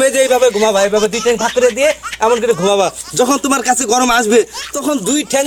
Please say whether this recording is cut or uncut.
uncut